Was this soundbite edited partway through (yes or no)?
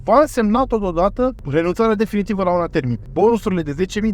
yes